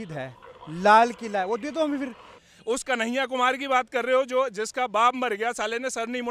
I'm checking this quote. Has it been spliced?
yes; 1 cut; at 2.3 s

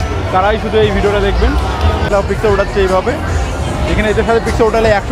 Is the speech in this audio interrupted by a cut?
yes; 1 cut; at 2.1 s

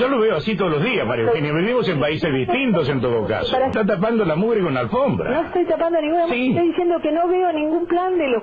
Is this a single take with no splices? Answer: no; 1 cut; at 3.7 s

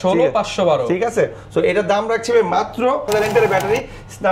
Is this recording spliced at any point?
yes; 1 cut; at 3.1 s

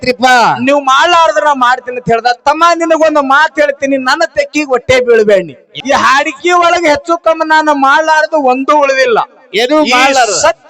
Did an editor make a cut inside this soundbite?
yes; 1 cut; at 5.8 s

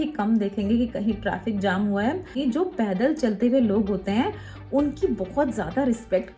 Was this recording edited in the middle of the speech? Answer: yes; 1 cut; at 2.4 s

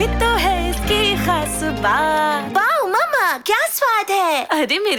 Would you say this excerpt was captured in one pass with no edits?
yes; 0 cuts

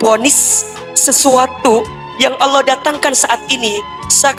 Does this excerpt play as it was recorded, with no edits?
yes; 0 cuts

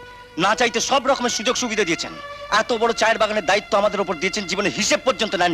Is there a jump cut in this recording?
no; 0 cuts

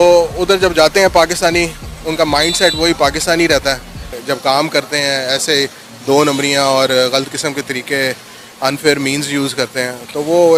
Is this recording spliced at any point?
no; 0 cuts

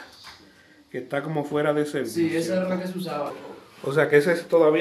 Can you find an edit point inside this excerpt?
yes; 1 cut; at 3.3 s

